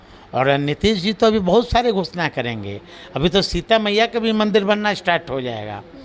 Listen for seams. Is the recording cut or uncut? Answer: uncut